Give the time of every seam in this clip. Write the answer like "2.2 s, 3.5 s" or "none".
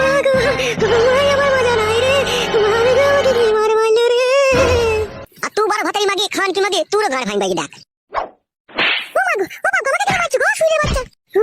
none

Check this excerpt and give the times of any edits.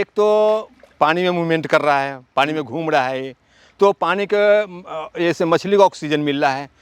none

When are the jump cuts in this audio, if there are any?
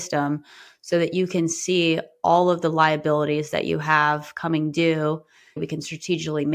5.6 s

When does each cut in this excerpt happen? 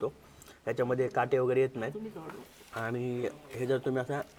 none

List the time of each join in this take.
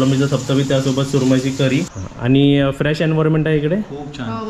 1.9 s

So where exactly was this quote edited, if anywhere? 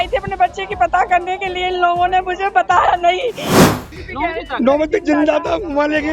3.6 s

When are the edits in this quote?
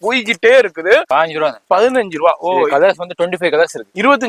1.1 s

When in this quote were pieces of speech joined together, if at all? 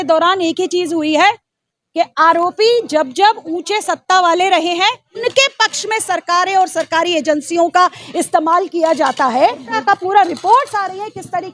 5.2 s, 9.8 s

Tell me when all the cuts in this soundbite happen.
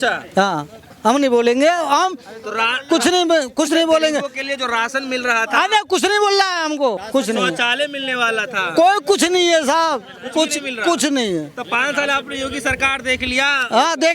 7.0 s

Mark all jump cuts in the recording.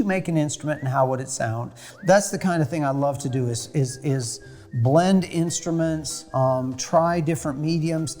1.9 s

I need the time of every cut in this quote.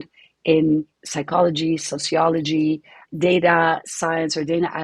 3.9 s

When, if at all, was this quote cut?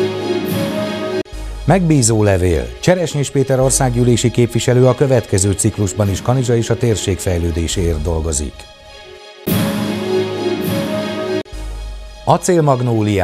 1.2 s

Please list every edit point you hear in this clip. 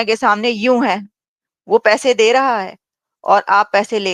none

